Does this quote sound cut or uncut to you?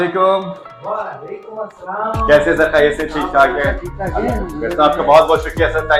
uncut